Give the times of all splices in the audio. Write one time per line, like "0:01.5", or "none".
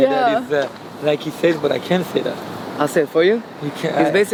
none